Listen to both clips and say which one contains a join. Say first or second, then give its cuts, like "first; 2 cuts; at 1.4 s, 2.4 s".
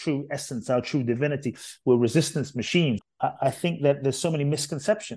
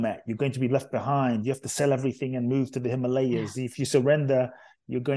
first; 1 cut; at 3.1 s